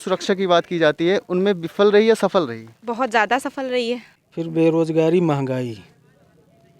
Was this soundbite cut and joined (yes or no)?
yes